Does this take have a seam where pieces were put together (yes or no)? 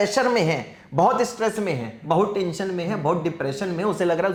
no